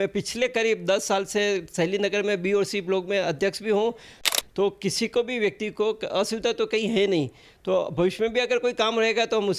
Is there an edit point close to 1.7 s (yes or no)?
no